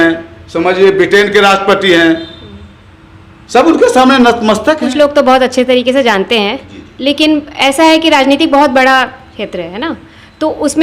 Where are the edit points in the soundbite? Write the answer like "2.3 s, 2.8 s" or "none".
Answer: 4.8 s

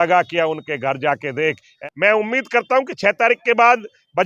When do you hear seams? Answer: 1.7 s

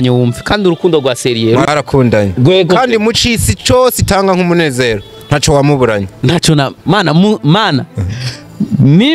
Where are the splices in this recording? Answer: 1.7 s

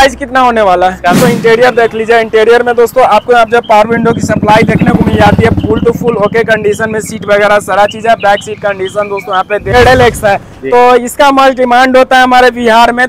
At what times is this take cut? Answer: 1.2 s, 9.7 s

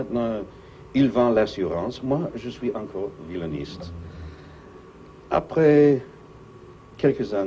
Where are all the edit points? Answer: 1.6 s

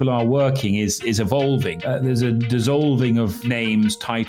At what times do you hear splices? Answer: 1.7 s, 3.4 s

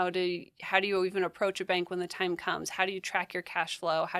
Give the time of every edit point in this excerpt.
none

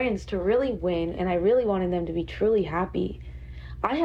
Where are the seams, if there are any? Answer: none

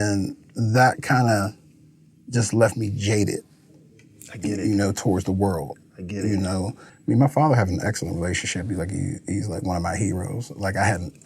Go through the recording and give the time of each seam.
6.8 s

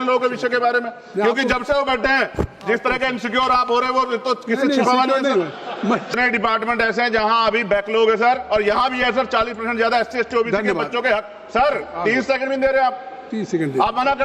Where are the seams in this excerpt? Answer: 6.1 s

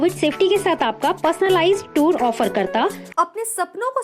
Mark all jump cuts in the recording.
3.0 s

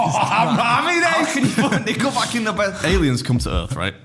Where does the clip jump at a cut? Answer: 2.8 s

